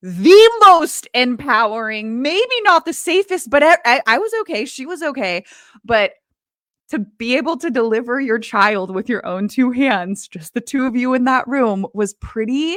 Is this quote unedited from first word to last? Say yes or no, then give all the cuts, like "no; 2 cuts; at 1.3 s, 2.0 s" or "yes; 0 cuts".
yes; 0 cuts